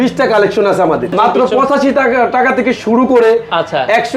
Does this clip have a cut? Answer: yes; 1 cut; at 1.1 s

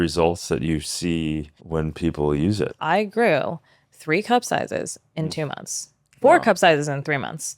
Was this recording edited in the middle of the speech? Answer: yes; 2 cuts; at 1.6 s, 2.8 s

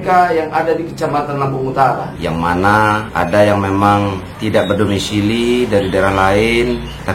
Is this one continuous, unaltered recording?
no; 1 cut; at 2.1 s

